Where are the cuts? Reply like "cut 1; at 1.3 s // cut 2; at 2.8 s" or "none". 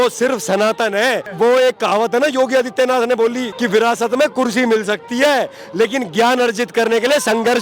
cut 1; at 1.3 s // cut 2; at 3.4 s